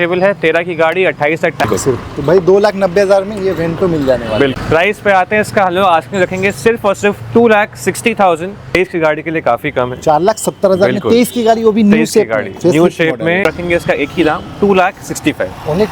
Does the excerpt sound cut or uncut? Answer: cut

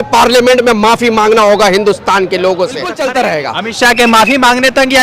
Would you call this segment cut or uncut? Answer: cut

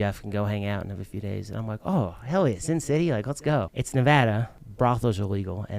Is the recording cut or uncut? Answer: cut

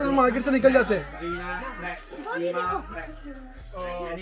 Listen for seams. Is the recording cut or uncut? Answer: uncut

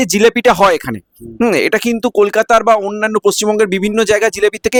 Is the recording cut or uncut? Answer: uncut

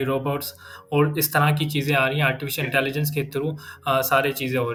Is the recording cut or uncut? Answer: uncut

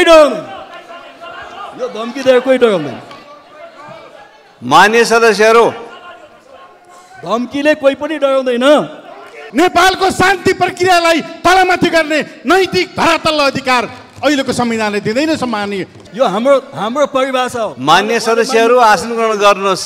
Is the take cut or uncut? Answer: cut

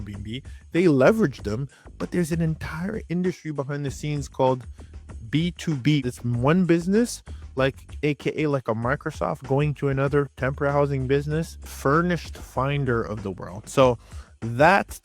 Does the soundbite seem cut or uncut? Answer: cut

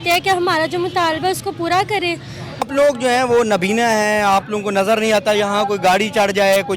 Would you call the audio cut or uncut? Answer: cut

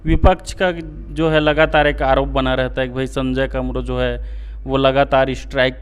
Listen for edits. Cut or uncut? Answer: uncut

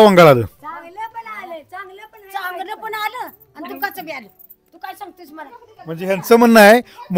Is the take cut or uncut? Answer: uncut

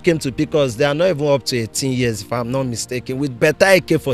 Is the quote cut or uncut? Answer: uncut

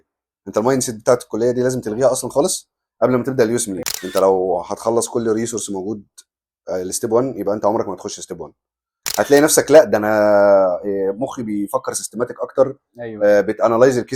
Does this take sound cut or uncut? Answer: cut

